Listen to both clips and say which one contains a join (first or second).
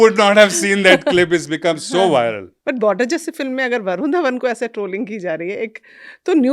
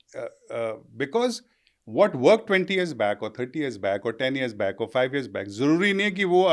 first